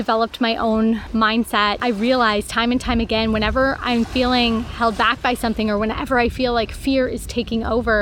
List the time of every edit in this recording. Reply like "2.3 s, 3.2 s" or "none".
1.8 s

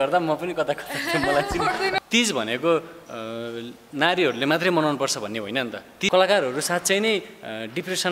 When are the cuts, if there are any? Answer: 2.0 s, 6.1 s

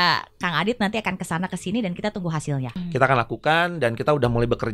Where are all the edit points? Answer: 2.7 s

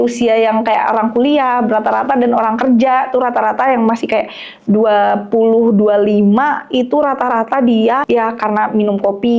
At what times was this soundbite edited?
8.0 s

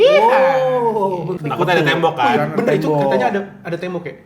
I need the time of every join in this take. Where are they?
1.3 s

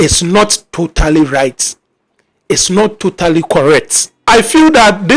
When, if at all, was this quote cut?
4.3 s

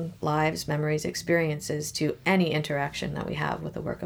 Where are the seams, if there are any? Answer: none

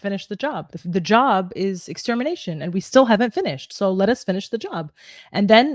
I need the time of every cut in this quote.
none

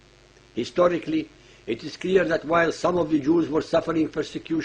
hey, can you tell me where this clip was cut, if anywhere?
1.7 s

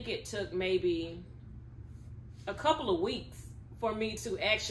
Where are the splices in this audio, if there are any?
none

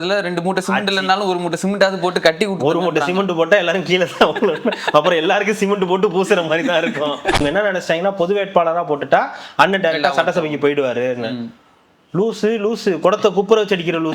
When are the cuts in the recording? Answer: 7.4 s

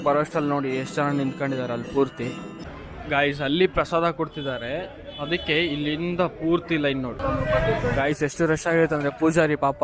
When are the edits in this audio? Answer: 2.6 s, 7.2 s

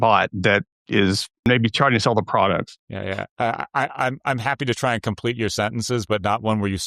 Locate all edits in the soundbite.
1.5 s, 2.8 s

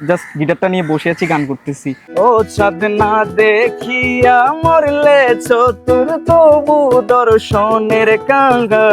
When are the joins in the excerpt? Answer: 2.1 s

